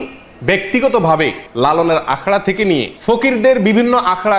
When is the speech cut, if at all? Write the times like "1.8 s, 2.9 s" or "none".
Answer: 1.4 s, 2.9 s